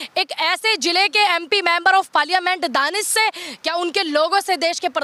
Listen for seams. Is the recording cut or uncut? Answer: uncut